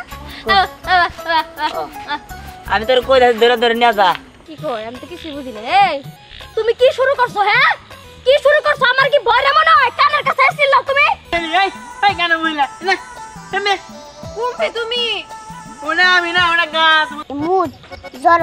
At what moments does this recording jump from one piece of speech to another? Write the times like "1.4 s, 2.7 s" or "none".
4.4 s, 11.3 s, 17.2 s